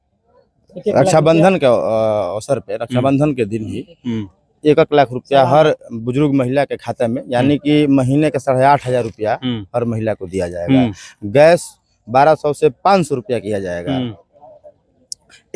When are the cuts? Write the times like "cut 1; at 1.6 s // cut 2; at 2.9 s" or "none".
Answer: none